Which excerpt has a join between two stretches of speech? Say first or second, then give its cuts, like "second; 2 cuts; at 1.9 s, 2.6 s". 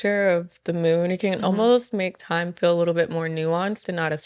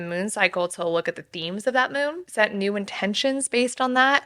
second; 1 cut; at 2.2 s